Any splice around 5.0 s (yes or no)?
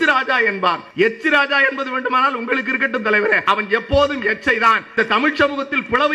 yes